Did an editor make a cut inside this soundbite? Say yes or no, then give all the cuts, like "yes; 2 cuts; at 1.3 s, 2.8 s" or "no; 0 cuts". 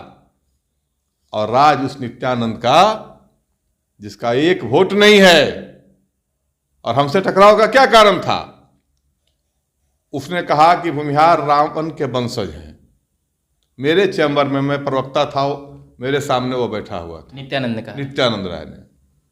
no; 0 cuts